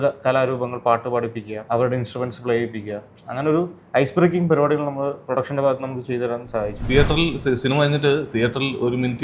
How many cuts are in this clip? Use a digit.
2